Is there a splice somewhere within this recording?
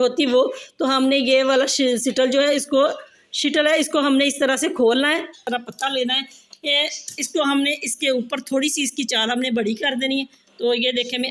yes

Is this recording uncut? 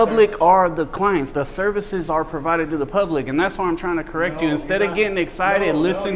yes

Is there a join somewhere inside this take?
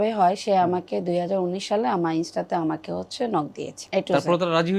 yes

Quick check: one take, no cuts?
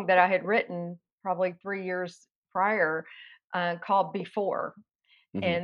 no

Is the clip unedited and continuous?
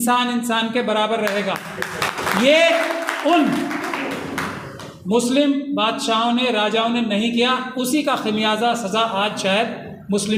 yes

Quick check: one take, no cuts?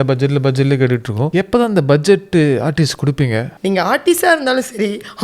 no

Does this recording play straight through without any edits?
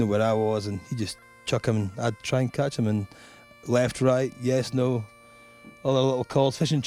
yes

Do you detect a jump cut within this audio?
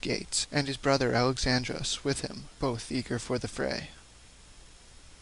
yes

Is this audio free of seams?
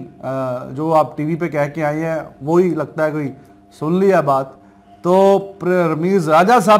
yes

